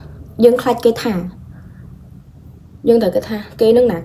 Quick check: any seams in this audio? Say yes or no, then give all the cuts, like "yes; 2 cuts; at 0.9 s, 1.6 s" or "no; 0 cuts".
no; 0 cuts